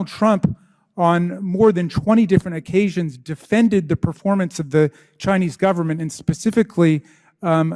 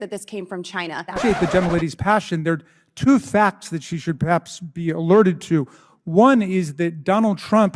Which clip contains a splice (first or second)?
second